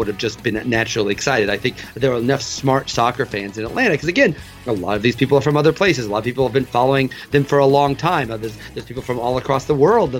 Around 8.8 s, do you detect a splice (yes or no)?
no